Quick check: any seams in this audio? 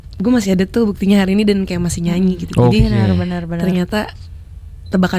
no; 0 cuts

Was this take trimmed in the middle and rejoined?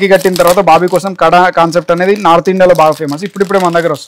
no; 0 cuts

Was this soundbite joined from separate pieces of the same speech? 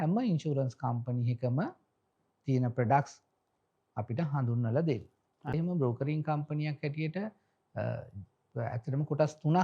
yes; 1 cut; at 5.5 s

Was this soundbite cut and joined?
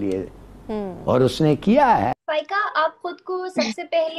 yes; 1 cut; at 2.2 s

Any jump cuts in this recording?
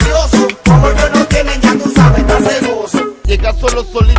yes; 1 cut; at 3.1 s

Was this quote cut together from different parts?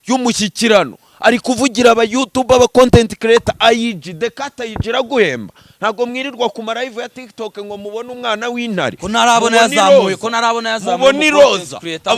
no; 0 cuts

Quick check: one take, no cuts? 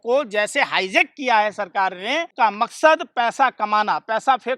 no; 1 cut; at 2.3 s

